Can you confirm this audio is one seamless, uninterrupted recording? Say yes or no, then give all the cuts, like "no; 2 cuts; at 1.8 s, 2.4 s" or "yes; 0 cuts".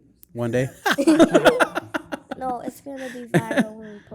yes; 0 cuts